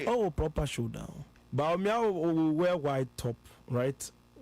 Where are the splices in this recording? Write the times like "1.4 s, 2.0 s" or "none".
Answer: 1.3 s